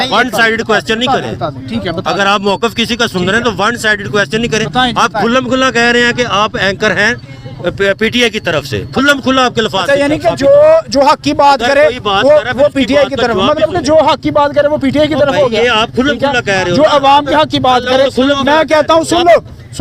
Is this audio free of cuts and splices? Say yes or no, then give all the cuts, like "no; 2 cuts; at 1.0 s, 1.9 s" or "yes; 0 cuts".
yes; 0 cuts